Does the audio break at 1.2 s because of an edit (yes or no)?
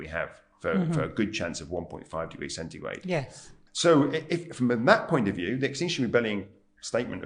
no